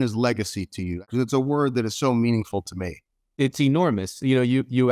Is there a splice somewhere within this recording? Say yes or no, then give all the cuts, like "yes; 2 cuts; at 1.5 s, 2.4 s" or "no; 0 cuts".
yes; 1 cut; at 1.0 s